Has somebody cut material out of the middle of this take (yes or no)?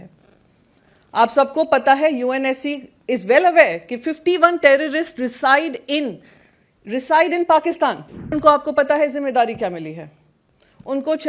yes